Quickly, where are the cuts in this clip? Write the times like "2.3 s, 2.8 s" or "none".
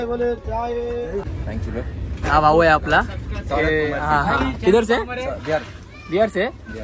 1.2 s

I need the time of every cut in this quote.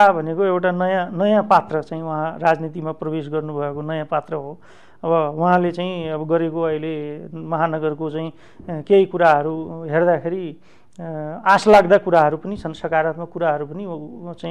none

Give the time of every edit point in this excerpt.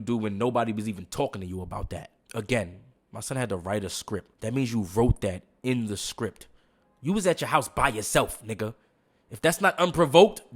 2.2 s, 4.3 s

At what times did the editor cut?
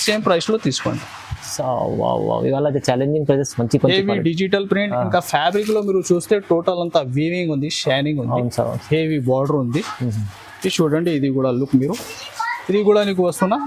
none

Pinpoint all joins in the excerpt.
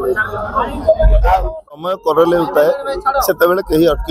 1.7 s

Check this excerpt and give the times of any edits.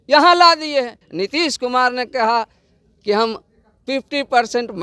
1.0 s

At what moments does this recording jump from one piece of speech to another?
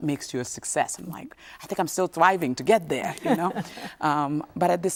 none

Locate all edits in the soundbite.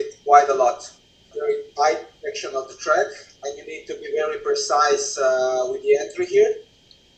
1.3 s

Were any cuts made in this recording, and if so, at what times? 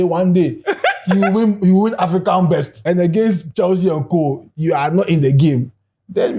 2.7 s

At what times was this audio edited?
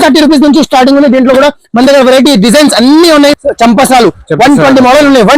3.4 s

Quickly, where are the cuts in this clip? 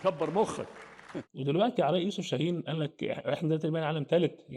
0.9 s

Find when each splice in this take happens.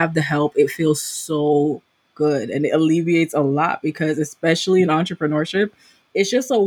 none

